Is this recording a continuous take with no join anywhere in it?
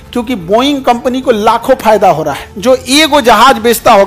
no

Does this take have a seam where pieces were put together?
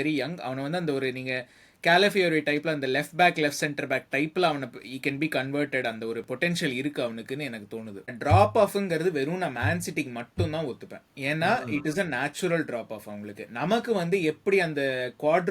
yes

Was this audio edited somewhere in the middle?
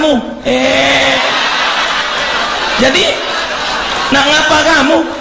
no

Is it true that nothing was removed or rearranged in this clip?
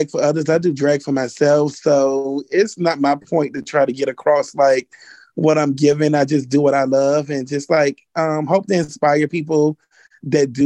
yes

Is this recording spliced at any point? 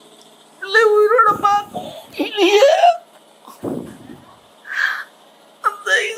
no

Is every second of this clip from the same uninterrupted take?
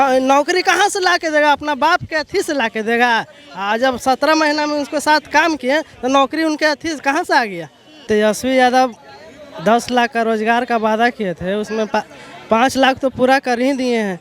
no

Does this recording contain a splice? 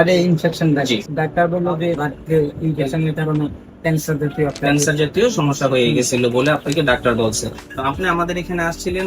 yes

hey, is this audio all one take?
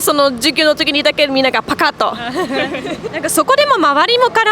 no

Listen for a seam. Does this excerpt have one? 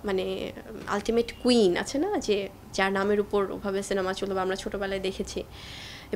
no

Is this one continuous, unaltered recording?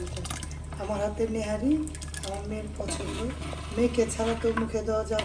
yes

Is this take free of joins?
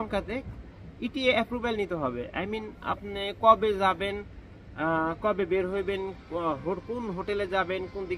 yes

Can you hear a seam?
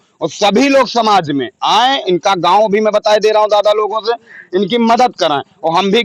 no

